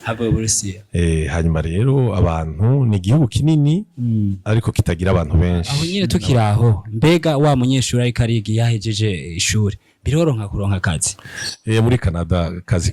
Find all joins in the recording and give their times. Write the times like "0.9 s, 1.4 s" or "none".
5.7 s